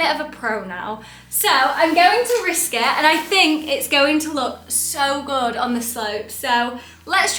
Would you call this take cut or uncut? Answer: uncut